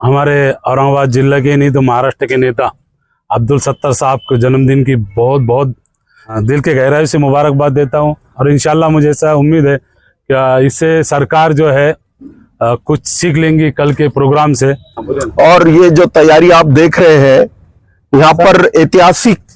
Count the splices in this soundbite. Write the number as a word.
three